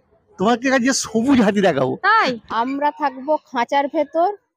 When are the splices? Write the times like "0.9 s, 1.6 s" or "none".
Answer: 2.4 s